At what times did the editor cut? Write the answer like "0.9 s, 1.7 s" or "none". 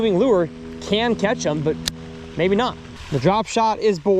3.0 s